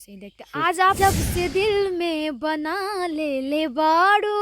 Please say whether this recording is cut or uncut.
cut